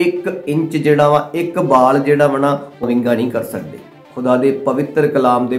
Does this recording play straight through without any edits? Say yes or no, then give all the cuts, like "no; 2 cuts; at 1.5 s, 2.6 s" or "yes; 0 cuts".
no; 2 cuts; at 2.8 s, 4.1 s